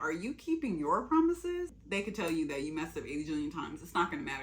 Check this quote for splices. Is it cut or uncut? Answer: cut